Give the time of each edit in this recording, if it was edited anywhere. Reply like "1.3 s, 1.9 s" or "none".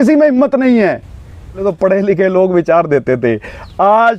1.7 s